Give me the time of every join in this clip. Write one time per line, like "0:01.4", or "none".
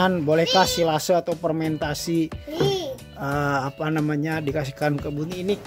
none